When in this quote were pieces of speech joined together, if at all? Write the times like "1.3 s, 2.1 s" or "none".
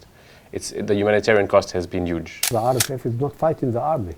2.5 s

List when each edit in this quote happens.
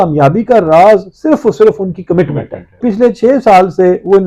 2.8 s

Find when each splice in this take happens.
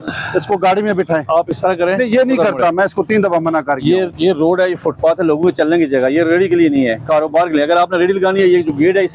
none

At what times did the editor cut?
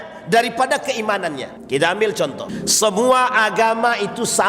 1.5 s, 2.5 s

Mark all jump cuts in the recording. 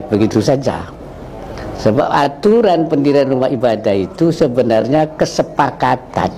none

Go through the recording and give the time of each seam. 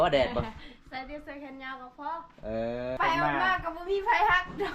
3.0 s

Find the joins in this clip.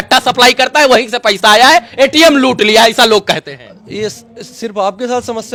none

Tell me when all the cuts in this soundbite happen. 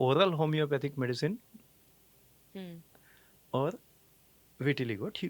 none

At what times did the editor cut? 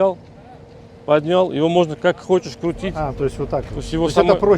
none

